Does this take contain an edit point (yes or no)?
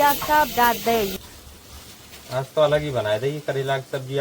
yes